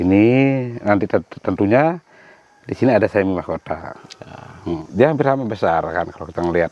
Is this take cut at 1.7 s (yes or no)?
no